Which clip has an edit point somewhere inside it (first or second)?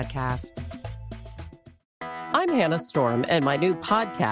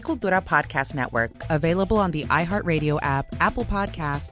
first